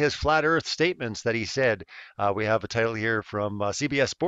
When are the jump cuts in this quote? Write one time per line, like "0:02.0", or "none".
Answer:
none